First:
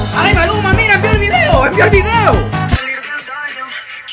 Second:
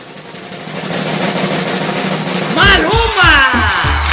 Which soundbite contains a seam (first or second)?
first